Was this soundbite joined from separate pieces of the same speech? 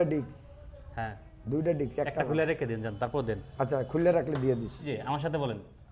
yes; 1 cut; at 4.9 s

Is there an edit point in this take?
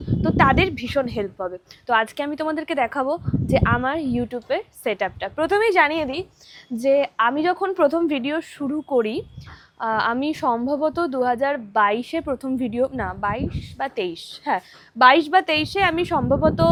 no; 0 cuts

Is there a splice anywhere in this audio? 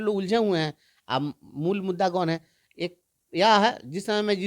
no; 0 cuts

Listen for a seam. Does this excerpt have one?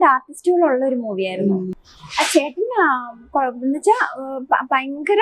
yes; 1 cut; at 1.8 s

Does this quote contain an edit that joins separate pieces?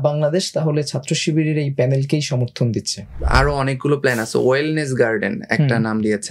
yes; 1 cut; at 3.2 s

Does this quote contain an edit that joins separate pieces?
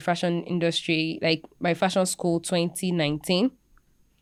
no; 0 cuts

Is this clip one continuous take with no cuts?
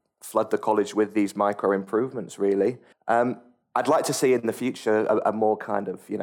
no; 2 cuts; at 2.9 s, 3.5 s

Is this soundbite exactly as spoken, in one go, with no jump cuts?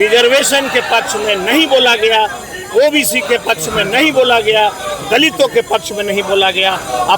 yes; 0 cuts

